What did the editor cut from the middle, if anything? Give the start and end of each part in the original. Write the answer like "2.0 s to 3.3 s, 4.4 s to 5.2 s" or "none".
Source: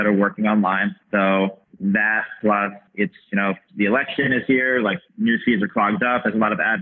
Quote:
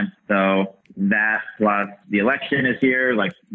2.8 s to 3.7 s